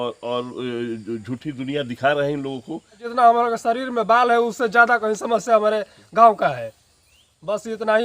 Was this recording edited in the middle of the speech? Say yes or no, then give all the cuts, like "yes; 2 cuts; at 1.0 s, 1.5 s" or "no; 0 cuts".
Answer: yes; 1 cut; at 3.1 s